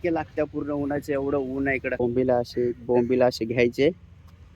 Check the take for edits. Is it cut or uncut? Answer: cut